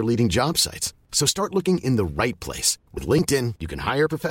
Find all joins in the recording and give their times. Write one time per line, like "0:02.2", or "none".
none